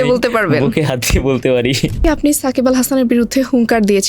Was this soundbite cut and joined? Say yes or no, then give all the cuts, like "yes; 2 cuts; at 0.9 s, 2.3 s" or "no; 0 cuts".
yes; 1 cut; at 2.0 s